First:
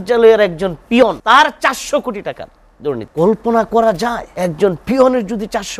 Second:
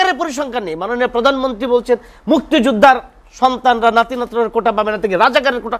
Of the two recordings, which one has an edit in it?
first; 3 cuts; at 1.2 s, 3.1 s, 4.2 s

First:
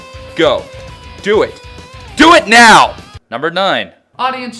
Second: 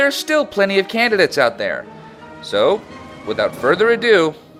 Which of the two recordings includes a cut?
first; 1 cut; at 3.7 s

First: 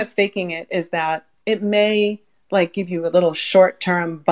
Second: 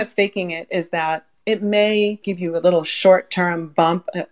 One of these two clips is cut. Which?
second; 1 cut; at 2.3 s

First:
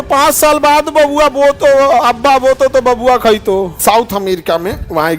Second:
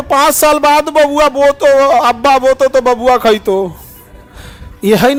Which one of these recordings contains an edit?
first; 1 cut; at 3.7 s

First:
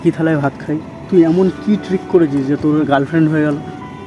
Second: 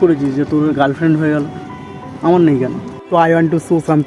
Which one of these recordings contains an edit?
second; 1 cut; at 2.9 s

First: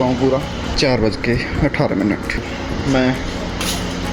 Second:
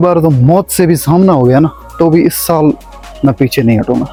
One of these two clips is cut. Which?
first; 2 cuts; at 0.7 s, 2.5 s

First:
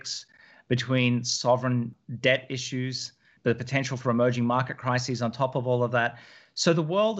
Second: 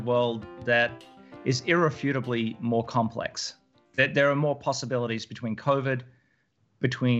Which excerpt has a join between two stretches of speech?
first; 2 cuts; at 2.0 s, 3.3 s

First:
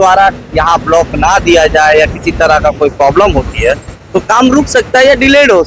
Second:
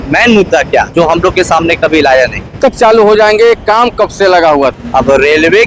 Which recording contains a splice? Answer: second; 3 cuts; at 0.9 s, 2.6 s, 4.8 s

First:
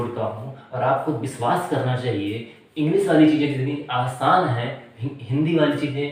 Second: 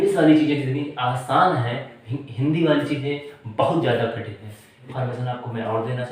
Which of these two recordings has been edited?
second; 1 cut; at 4.8 s

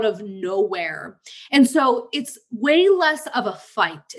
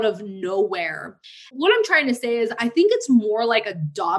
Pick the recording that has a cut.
second; 2 cuts; at 1.4 s, 2.6 s

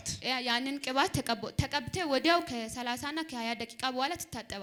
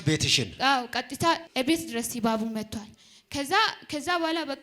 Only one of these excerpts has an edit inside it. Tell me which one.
second; 1 cut; at 1.5 s

